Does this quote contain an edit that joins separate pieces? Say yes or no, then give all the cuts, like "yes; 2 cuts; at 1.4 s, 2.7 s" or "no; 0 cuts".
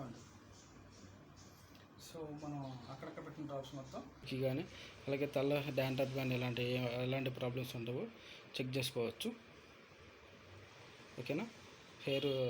yes; 1 cut; at 4.3 s